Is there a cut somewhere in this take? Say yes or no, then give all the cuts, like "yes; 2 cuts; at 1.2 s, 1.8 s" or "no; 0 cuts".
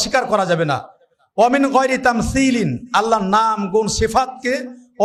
no; 0 cuts